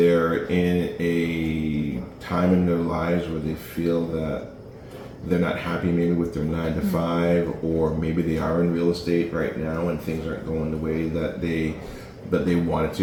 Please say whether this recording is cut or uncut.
uncut